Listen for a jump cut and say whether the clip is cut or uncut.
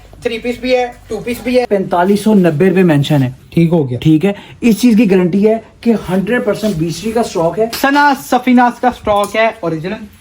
cut